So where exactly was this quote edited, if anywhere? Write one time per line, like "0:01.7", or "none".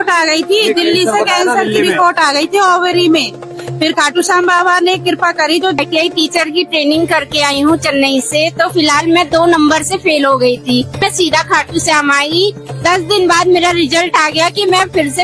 0:05.8
0:11.0
0:12.7

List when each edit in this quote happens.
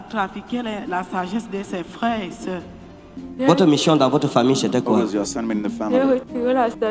0:03.1

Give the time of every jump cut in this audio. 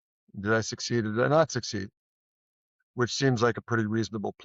none

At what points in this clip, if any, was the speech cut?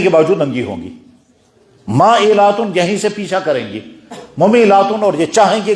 none

